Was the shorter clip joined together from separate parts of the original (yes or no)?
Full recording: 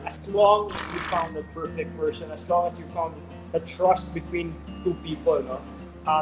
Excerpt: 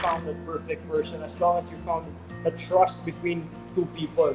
no